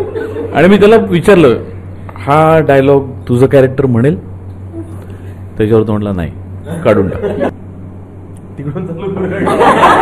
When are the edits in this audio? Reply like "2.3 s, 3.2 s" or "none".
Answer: 7.5 s